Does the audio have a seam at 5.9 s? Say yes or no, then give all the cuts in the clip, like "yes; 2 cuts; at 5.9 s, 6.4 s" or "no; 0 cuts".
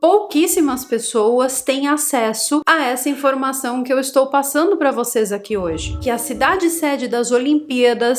yes; 1 cut; at 5.9 s